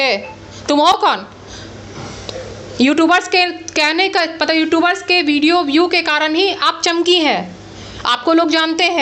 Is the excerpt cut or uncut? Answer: uncut